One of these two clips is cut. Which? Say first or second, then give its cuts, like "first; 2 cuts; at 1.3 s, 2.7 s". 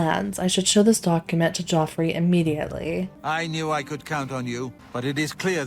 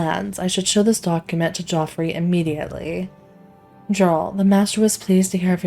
first; 2 cuts; at 3.1 s, 4.8 s